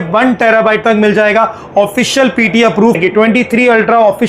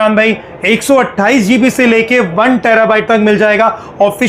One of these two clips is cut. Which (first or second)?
first